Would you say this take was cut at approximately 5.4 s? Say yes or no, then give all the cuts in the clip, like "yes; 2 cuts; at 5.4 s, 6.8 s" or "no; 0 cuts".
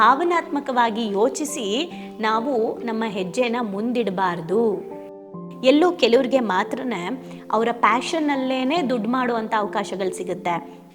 yes; 1 cut; at 5.4 s